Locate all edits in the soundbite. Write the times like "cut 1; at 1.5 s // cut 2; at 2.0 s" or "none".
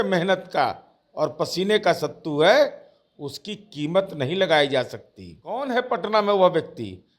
cut 1; at 5.6 s